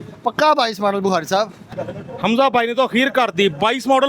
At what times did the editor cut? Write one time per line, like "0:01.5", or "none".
0:01.6